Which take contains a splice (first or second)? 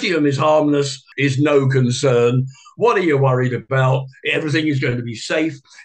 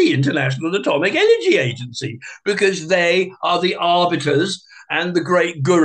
first